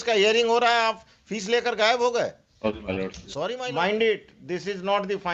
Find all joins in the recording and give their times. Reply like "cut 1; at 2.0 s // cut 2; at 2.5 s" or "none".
cut 1; at 3.2 s